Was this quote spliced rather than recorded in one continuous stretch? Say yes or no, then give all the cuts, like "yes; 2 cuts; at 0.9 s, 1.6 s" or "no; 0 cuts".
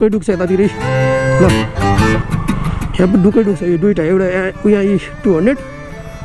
no; 0 cuts